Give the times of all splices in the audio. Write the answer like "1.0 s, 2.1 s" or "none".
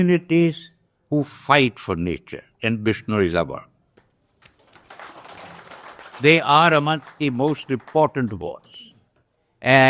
none